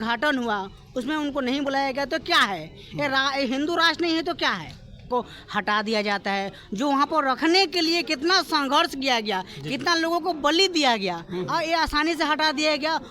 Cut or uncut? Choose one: cut